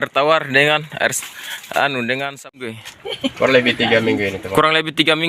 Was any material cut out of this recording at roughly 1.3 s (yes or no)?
no